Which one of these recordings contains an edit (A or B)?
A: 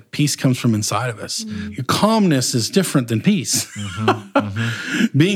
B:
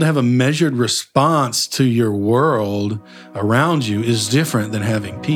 A